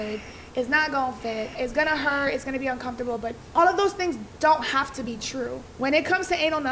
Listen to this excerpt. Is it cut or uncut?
cut